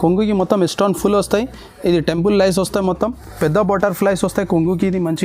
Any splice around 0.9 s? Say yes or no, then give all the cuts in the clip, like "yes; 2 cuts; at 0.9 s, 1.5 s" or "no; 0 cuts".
no; 1 cut; at 3.3 s